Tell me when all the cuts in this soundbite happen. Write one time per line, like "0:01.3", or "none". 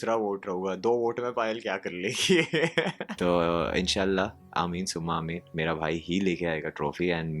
0:03.0